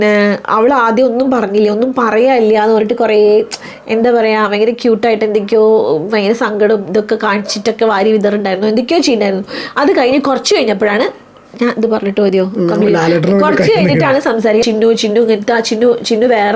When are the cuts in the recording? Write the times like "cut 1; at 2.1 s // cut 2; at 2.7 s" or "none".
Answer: cut 1; at 14.6 s